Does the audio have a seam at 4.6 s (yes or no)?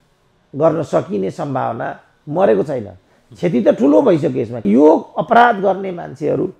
yes